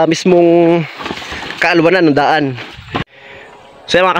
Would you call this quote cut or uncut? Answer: cut